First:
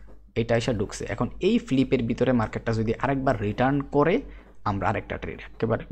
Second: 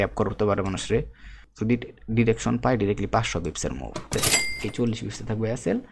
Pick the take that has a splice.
second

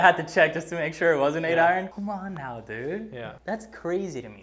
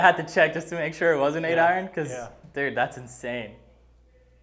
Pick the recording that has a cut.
first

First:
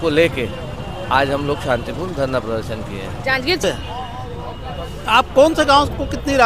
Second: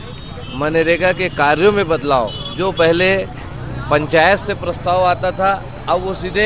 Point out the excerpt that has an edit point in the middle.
first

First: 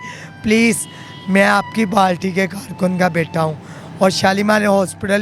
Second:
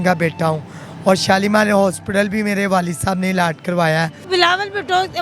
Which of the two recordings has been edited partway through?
second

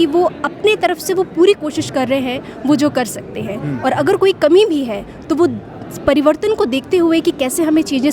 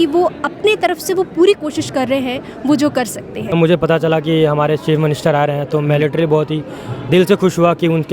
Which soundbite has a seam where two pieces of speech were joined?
second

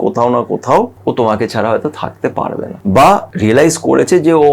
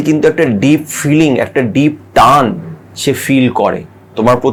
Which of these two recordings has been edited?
first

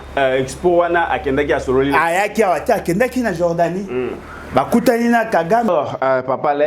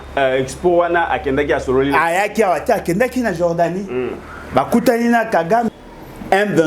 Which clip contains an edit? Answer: second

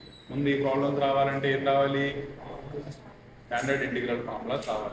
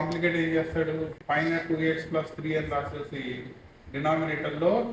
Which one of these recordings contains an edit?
second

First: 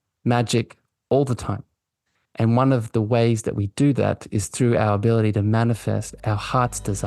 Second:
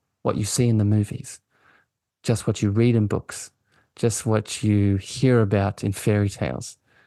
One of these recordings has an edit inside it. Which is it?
first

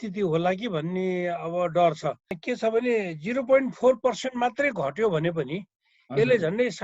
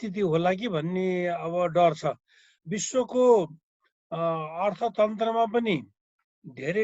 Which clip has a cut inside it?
first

